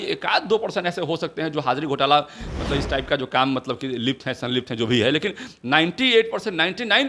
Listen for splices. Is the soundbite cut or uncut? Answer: uncut